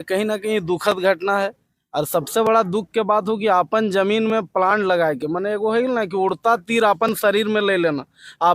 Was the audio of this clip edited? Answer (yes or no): no